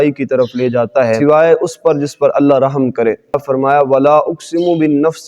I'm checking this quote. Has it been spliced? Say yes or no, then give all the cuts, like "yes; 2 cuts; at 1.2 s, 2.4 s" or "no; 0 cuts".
yes; 2 cuts; at 1.2 s, 3.4 s